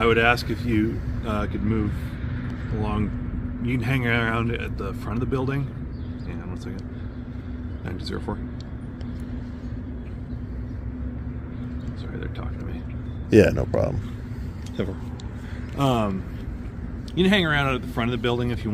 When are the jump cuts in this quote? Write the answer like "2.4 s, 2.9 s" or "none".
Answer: none